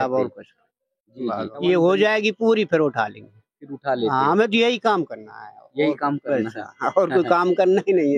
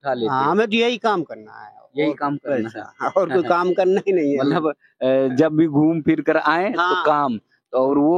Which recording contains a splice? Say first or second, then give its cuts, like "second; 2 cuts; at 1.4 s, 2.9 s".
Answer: first; 1 cut; at 1.5 s